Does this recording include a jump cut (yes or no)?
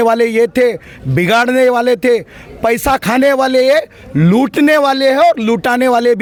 no